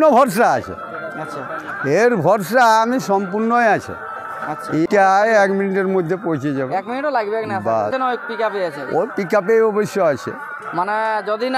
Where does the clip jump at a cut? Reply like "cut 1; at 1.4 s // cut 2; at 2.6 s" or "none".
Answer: cut 1; at 4.9 s // cut 2; at 7.9 s